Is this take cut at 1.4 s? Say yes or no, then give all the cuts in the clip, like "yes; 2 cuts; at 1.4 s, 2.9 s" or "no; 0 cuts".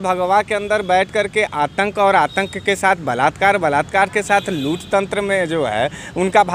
no; 0 cuts